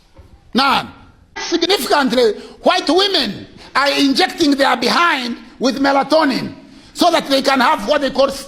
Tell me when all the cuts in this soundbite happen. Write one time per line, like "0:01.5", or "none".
0:01.4

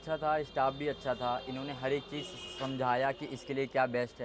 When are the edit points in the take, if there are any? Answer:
none

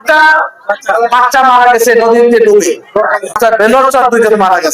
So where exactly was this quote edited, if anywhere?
0:03.4

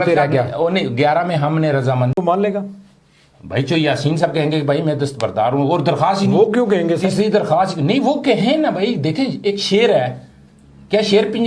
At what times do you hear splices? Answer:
0:02.1

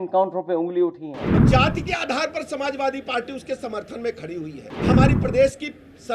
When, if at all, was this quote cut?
0:01.4
0:04.7

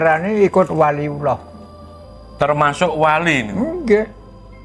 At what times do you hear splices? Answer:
none

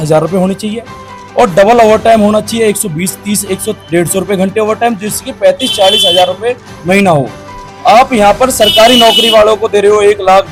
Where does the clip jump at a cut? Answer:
none

